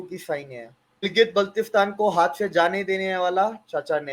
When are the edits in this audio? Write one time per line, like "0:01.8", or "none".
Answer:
0:01.0

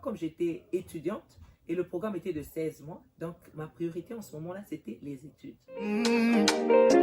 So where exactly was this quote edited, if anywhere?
0:05.7

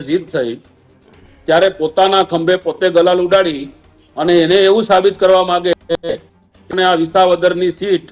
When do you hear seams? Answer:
none

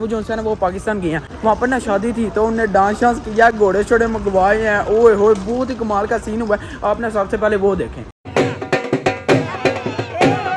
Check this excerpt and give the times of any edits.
none

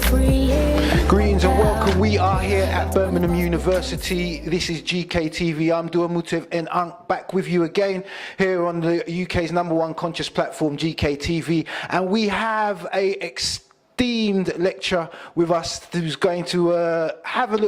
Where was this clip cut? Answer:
0:08.2

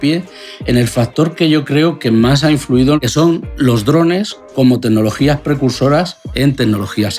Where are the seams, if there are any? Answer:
0:03.0
0:06.2

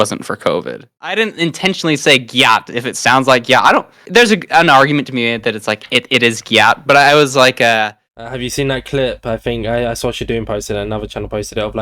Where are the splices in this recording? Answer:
0:00.9
0:07.9

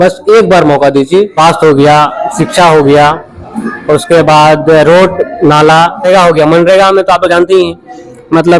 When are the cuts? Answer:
0:01.3
0:06.1

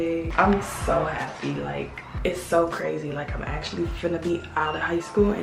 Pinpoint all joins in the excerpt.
none

